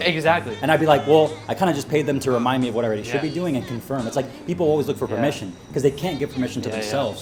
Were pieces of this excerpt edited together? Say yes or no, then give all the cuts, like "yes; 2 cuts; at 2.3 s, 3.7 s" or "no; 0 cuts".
no; 0 cuts